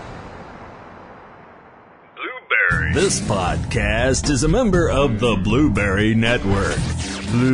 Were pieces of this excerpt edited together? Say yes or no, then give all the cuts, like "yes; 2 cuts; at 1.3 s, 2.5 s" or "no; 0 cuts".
yes; 1 cut; at 2.1 s